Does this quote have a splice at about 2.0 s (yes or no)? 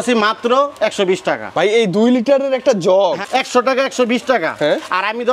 no